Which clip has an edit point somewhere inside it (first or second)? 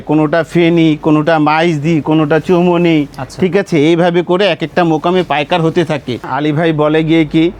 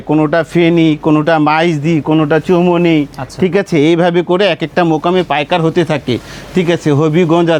first